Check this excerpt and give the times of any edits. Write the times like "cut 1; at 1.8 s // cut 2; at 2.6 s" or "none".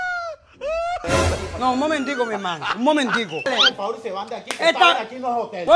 cut 1; at 1.0 s // cut 2; at 3.4 s

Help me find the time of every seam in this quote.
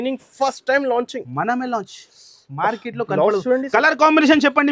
none

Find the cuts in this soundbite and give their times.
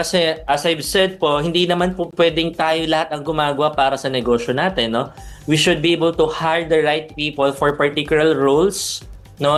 none

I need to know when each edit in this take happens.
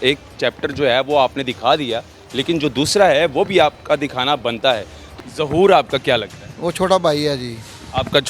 cut 1; at 5.0 s

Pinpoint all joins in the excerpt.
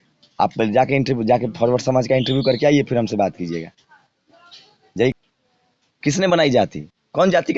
cut 1; at 5.1 s

